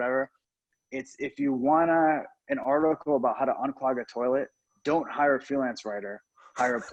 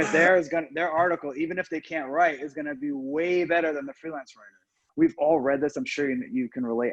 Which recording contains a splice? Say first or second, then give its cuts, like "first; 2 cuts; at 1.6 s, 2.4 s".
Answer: second; 1 cut; at 4.8 s